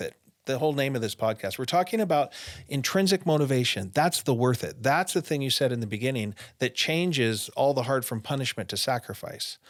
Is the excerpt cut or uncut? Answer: uncut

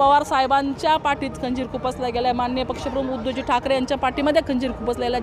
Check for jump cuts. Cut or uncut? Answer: uncut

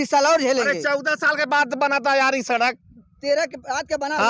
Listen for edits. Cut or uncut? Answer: uncut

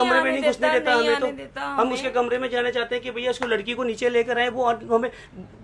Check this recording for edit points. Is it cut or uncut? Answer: uncut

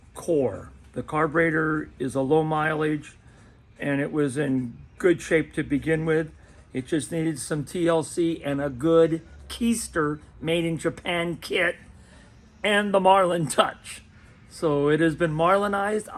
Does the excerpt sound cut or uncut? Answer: uncut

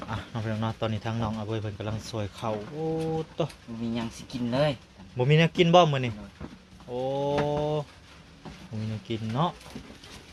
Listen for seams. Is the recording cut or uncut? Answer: uncut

